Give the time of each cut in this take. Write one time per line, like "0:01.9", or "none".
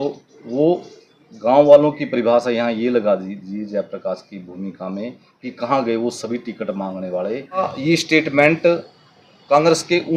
0:07.7